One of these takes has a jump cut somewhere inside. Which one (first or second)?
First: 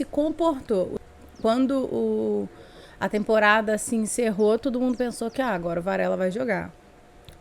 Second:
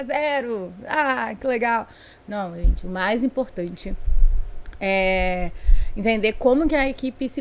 first